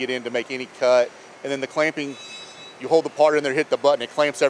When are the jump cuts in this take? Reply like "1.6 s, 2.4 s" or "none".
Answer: 1.3 s, 2.7 s